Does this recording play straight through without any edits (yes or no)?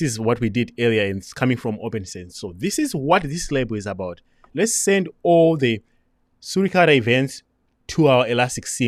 yes